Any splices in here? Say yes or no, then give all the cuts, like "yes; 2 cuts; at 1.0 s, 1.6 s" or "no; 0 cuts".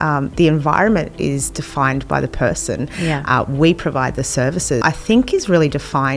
yes; 1 cut; at 4.8 s